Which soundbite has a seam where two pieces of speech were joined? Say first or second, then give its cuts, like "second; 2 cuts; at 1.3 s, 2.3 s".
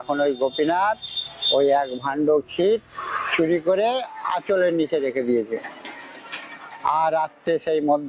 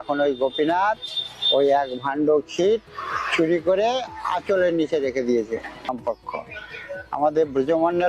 second; 1 cut; at 5.9 s